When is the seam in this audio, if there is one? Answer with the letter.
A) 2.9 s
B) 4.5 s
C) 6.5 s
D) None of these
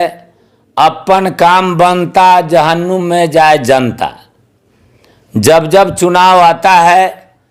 D